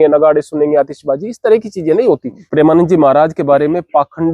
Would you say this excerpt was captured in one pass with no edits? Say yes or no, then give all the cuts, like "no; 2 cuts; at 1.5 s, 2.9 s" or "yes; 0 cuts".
no; 1 cut; at 2.4 s